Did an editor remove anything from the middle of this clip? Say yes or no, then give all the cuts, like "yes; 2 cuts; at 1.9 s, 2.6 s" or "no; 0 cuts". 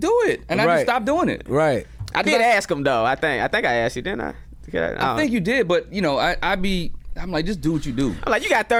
no; 0 cuts